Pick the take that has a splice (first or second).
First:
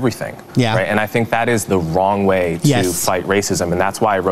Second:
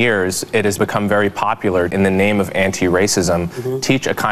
second